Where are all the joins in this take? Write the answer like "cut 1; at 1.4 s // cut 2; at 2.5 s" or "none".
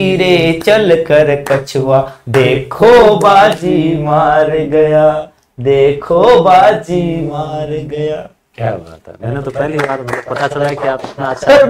none